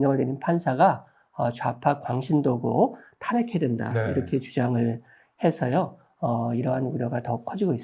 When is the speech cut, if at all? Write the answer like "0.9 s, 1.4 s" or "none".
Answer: none